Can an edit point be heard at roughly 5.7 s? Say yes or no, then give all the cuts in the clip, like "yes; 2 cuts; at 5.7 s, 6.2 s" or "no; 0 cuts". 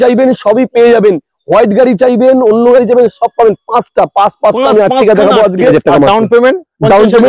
yes; 1 cut; at 5.7 s